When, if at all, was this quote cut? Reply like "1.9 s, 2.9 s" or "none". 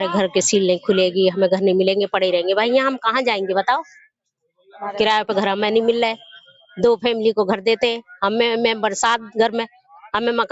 none